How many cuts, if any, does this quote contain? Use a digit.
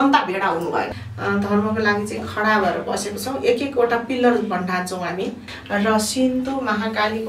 2